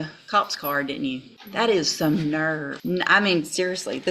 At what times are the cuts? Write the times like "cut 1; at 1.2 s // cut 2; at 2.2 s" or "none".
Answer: cut 1; at 1.4 s // cut 2; at 2.7 s